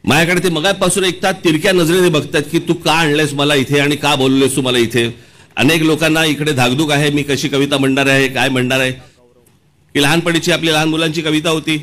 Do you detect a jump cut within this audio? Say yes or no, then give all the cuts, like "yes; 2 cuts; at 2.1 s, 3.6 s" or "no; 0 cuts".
yes; 1 cut; at 9.1 s